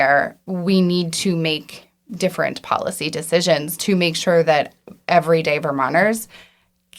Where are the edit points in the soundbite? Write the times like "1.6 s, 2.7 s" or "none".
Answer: none